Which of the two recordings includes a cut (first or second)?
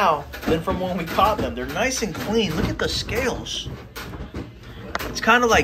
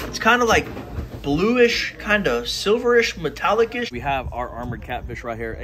second